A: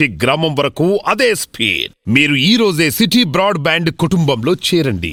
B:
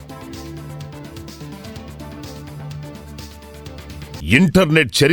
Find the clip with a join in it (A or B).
B